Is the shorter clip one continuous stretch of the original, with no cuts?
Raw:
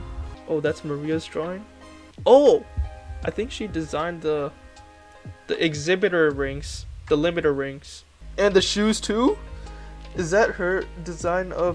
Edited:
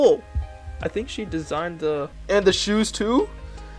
no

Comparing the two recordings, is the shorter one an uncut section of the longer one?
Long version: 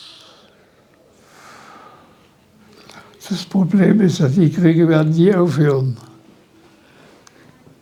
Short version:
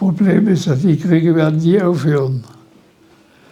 yes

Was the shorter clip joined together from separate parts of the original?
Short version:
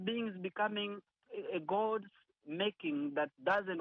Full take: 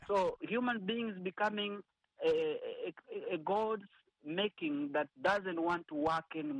yes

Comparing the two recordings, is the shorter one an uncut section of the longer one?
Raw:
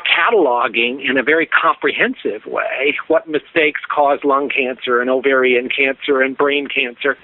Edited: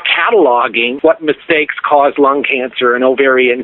no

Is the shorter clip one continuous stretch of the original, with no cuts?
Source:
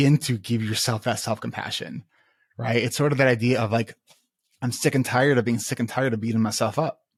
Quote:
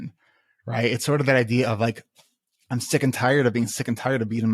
yes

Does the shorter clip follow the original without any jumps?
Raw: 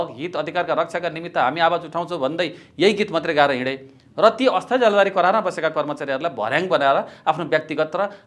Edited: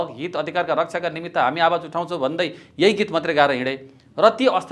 yes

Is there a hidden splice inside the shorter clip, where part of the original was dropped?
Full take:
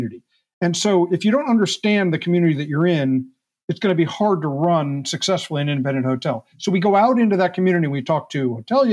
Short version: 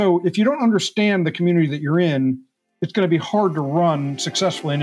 no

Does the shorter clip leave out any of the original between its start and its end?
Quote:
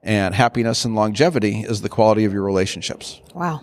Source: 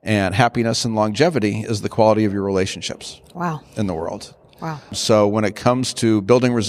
no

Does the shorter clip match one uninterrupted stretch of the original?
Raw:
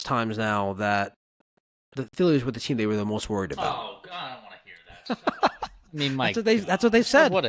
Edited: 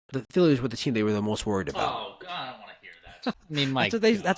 no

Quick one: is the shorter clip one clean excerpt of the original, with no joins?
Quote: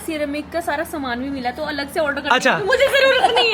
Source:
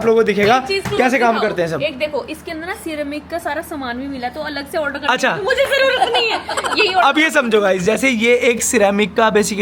yes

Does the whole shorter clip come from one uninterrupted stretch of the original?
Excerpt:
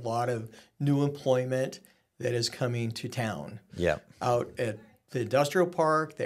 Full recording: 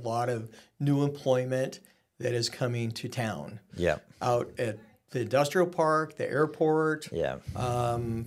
yes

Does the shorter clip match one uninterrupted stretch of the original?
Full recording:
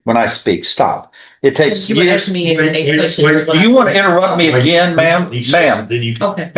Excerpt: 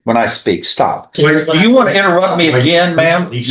no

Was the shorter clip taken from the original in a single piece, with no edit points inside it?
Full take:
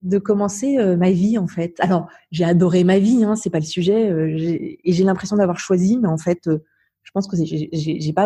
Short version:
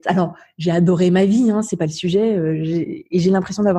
yes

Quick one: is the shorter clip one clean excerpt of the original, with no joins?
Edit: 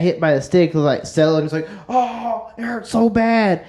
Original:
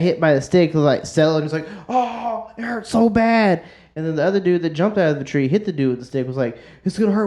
yes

